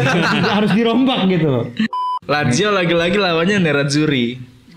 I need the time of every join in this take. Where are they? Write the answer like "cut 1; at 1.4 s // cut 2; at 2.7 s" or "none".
cut 1; at 2.1 s